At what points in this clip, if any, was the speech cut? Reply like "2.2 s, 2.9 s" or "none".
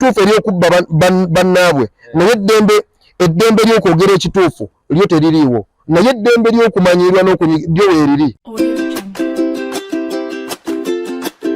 8.4 s